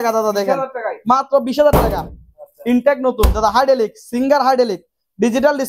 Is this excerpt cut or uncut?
uncut